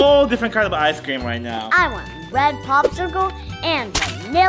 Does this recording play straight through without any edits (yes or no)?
no